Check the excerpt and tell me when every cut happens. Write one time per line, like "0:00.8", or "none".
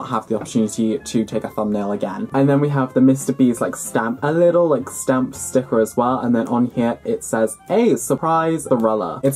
none